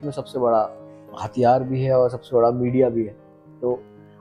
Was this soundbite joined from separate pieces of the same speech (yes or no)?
no